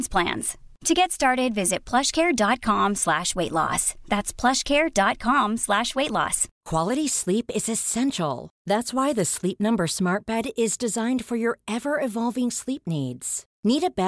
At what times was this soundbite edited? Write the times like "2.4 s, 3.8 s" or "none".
none